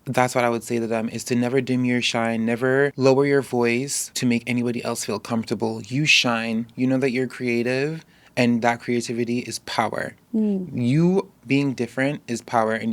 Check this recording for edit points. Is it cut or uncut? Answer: cut